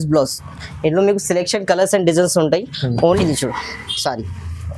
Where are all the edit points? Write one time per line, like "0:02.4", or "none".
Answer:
0:03.2